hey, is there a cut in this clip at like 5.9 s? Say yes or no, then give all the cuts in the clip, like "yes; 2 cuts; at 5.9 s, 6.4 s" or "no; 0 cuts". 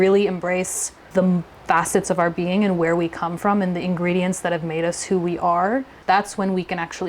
yes; 2 cuts; at 1.0 s, 5.9 s